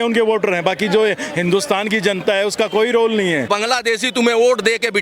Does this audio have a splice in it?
yes; 1 cut; at 3.5 s

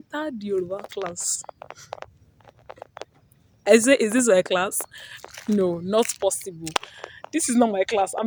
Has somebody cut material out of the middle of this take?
no; 0 cuts

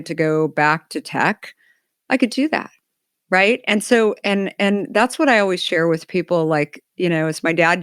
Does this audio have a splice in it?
no; 0 cuts

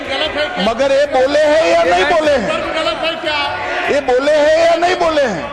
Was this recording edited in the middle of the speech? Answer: no; 0 cuts

